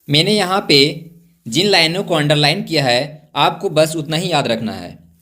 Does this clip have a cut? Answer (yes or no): no